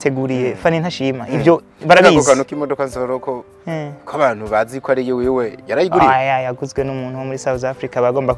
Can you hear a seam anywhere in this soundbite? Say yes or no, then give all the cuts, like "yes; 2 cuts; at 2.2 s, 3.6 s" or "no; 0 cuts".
no; 0 cuts